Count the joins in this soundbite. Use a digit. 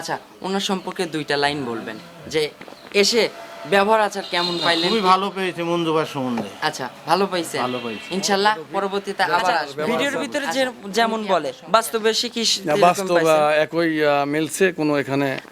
1